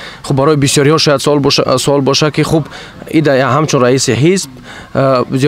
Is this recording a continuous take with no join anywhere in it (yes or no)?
yes